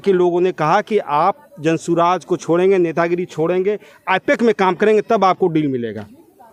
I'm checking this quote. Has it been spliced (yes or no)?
no